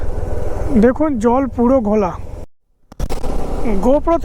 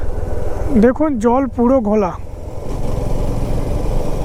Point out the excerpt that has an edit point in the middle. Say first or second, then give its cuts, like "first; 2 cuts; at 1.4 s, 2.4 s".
first; 1 cut; at 2.6 s